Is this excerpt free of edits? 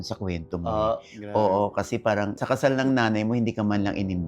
no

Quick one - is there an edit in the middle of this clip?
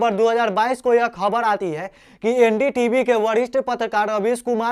no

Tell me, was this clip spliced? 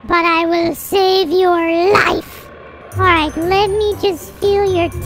no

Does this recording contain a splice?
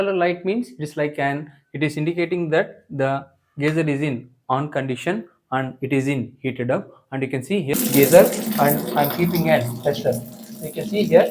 yes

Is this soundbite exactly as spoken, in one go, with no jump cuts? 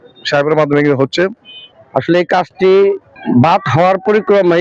no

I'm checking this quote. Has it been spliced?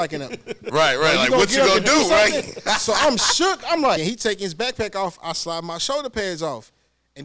yes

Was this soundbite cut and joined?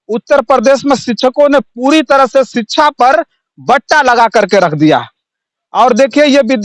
no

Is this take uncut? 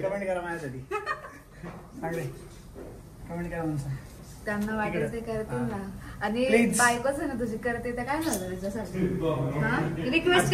yes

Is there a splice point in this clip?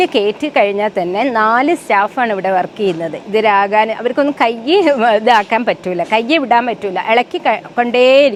no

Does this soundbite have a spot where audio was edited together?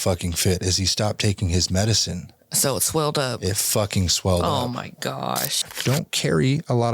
yes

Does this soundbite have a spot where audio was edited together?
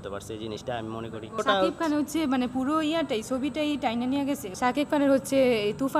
yes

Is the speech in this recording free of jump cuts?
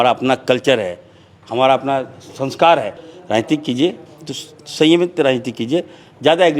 no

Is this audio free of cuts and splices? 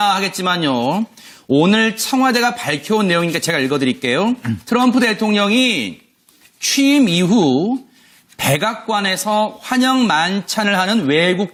yes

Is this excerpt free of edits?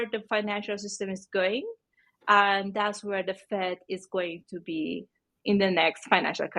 yes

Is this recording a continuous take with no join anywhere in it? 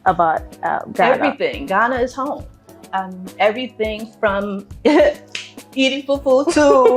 yes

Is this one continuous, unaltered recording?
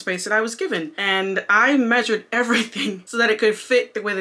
yes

